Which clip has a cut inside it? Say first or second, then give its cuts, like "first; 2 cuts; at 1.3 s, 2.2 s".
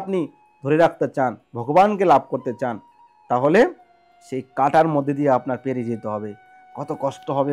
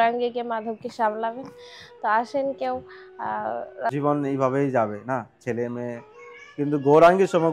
second; 1 cut; at 3.9 s